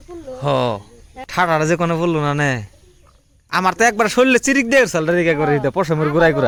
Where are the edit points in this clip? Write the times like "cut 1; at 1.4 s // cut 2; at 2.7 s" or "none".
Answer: none